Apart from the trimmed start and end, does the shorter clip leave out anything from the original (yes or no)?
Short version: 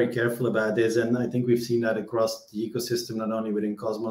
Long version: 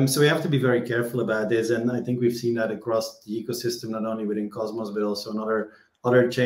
no